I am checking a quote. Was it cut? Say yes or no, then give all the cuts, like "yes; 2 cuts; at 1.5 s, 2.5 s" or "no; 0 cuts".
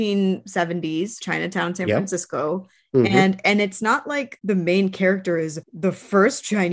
yes; 3 cuts; at 1.2 s, 4.3 s, 5.6 s